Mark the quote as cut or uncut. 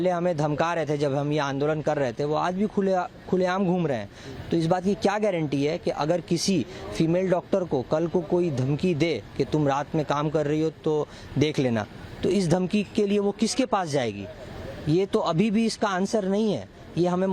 uncut